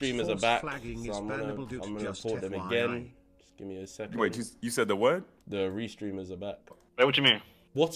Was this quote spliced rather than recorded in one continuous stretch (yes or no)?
yes